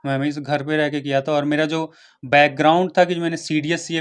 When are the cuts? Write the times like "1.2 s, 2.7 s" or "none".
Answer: none